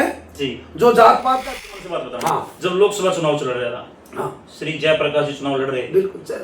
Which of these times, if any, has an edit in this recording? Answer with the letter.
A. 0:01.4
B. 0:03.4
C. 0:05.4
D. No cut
A